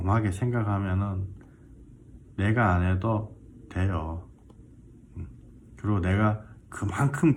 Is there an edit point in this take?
no; 0 cuts

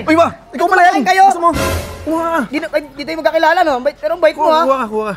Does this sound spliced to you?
no; 0 cuts

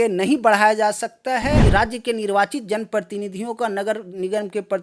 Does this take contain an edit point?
yes; 1 cut; at 1.6 s

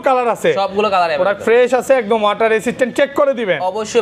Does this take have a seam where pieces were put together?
no; 0 cuts

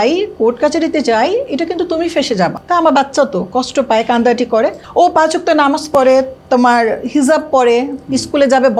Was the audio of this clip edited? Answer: yes; 2 cuts; at 2.6 s, 4.8 s

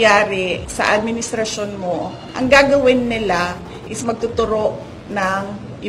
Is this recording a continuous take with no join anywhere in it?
no; 1 cut; at 2.2 s

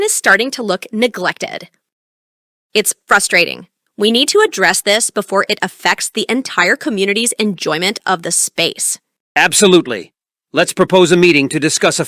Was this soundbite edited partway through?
no; 0 cuts

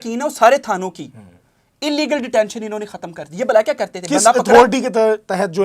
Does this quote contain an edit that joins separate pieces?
no; 0 cuts

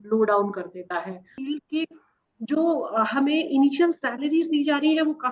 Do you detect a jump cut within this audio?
yes; 1 cut; at 1.4 s

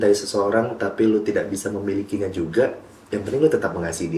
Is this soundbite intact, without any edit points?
yes; 0 cuts

